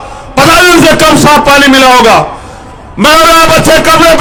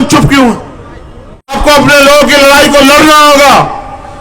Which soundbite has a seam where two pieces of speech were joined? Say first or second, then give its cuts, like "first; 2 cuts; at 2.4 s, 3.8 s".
second; 1 cut; at 1.6 s